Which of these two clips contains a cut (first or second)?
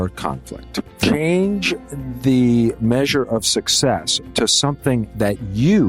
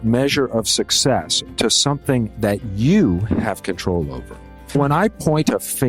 second